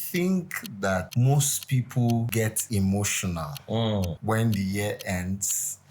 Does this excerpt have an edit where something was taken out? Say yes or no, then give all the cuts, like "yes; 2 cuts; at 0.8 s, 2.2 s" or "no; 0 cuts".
yes; 3 cuts; at 1.1 s, 2.5 s, 4.2 s